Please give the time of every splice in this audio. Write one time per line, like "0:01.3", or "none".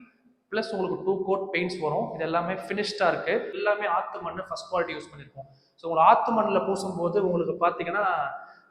0:03.6